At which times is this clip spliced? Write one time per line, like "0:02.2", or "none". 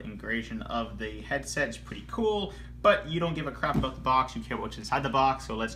0:02.0